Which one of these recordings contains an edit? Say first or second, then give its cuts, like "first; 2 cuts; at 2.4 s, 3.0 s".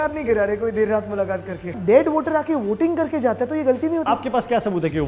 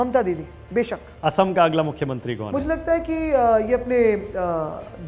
first; 1 cut; at 1.7 s